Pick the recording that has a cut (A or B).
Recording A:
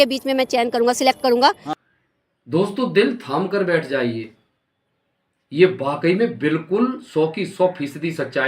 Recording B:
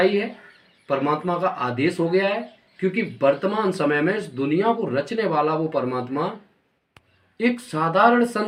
A